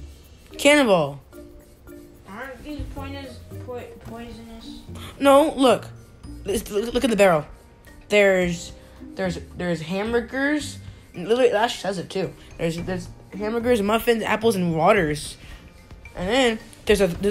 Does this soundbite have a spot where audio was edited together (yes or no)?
no